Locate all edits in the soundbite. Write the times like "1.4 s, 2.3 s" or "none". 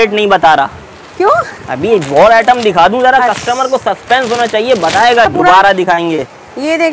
5.3 s